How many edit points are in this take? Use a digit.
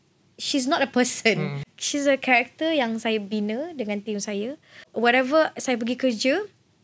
2